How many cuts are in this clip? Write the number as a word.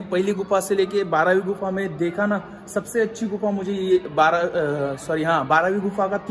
zero